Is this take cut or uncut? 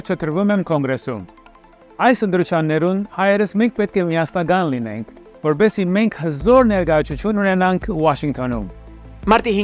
uncut